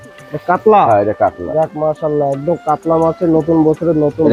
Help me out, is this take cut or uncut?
uncut